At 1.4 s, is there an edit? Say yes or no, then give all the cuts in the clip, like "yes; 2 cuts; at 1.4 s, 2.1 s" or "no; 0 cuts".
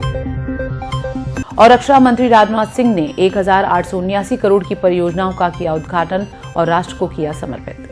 yes; 1 cut; at 1.4 s